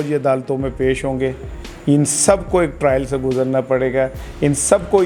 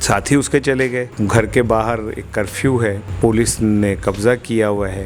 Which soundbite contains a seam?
second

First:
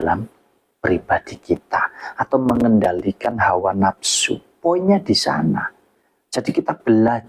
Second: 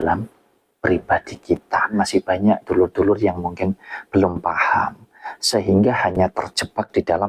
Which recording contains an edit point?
second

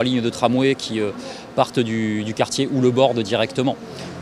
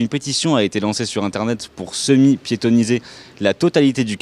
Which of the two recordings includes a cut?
first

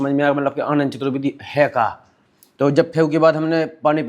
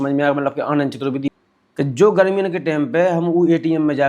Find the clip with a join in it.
second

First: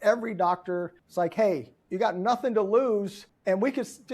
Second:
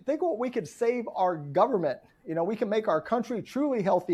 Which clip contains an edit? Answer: first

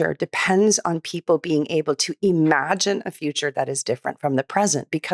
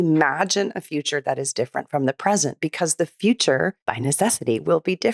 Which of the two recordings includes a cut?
second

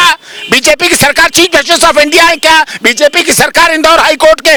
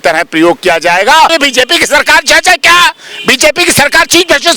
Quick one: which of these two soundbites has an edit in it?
second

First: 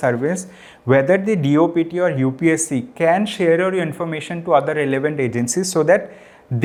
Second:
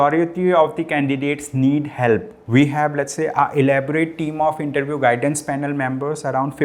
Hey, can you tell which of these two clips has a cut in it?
second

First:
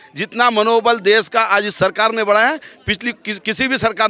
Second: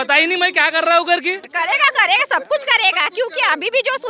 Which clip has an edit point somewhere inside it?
second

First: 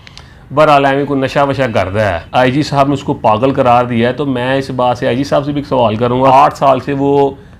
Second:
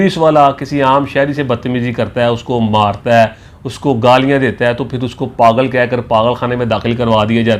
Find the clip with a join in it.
first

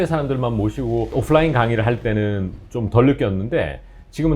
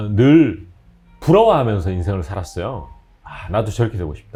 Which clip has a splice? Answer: first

